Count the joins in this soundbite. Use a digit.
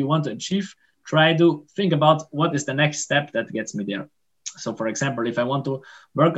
0